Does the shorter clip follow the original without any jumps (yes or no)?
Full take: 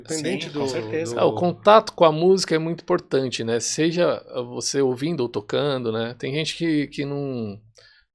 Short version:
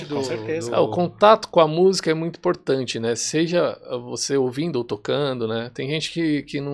yes